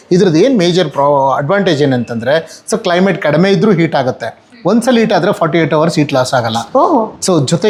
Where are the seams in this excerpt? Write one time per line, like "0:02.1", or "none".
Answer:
none